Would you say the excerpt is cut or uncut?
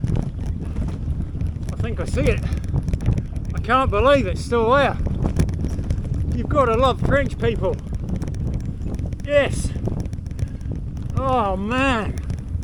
uncut